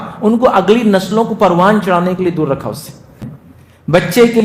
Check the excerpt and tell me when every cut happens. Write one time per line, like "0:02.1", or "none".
0:03.3